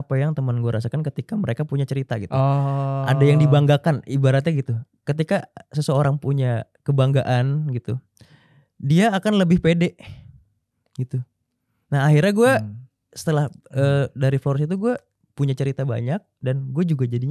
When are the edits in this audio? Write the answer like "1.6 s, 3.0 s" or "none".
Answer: none